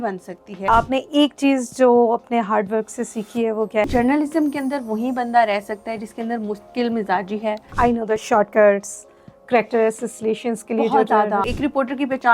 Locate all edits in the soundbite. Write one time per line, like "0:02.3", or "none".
0:00.7
0:03.8
0:08.1
0:11.5